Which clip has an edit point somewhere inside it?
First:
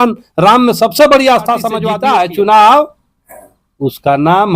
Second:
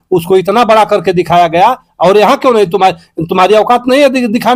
first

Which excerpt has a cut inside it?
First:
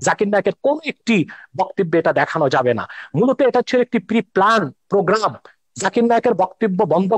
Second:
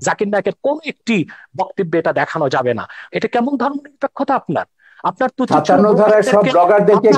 second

